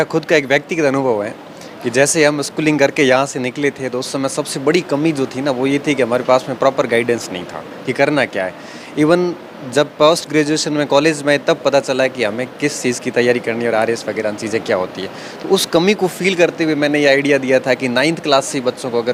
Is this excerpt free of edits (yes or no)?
yes